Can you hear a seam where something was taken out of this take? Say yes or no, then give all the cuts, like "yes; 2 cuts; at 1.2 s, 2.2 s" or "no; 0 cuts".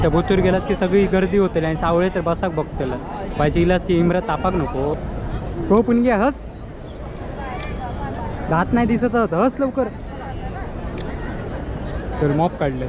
no; 0 cuts